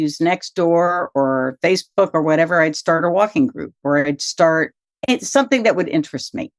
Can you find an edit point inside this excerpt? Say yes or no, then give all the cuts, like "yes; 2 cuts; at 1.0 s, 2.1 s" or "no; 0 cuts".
no; 0 cuts